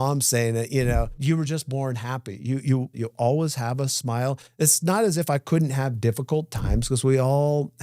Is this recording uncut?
no; 2 cuts; at 1.1 s, 3.0 s

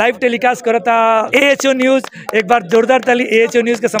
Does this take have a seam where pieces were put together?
yes; 1 cut; at 1.3 s

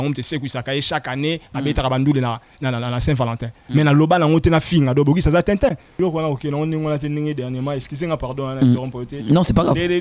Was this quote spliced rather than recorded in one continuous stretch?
yes; 1 cut; at 5.9 s

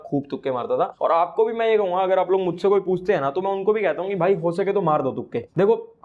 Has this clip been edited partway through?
no; 0 cuts

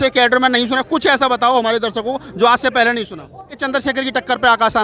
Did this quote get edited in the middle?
yes; 1 cut; at 3.6 s

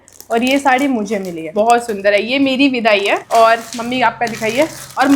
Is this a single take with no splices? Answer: no; 2 cuts; at 1.5 s, 3.2 s

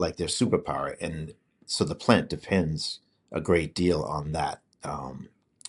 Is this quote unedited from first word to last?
yes; 0 cuts

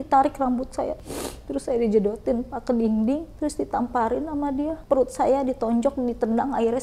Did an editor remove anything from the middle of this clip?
yes; 2 cuts; at 1.0 s, 4.8 s

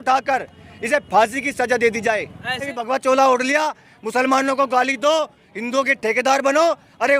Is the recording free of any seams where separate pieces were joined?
no; 1 cut; at 2.7 s

